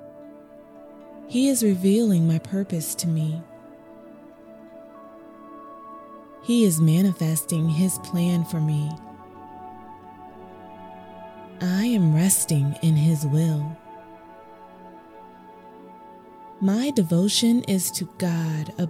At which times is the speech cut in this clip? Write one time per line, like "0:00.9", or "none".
none